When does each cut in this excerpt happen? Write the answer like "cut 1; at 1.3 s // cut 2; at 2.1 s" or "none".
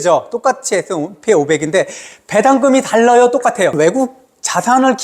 cut 1; at 3.7 s